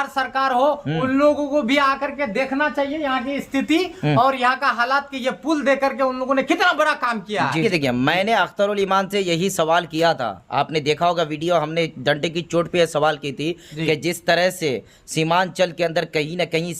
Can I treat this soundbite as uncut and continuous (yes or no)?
no